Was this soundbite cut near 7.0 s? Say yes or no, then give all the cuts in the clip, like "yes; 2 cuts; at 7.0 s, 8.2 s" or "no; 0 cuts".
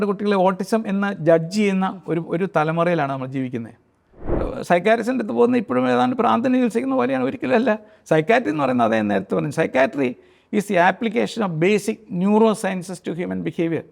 no; 1 cut; at 4.3 s